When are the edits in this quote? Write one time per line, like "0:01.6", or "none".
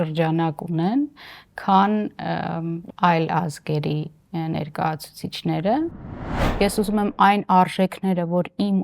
0:06.4